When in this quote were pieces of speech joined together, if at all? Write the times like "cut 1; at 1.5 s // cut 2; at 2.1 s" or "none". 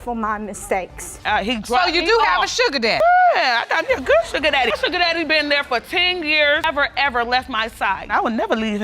cut 1; at 1.0 s